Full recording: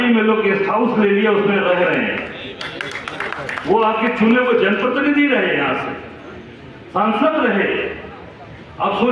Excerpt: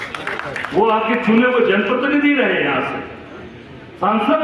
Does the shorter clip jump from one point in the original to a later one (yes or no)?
no